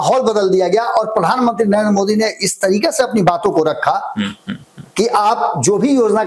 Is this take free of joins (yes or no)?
yes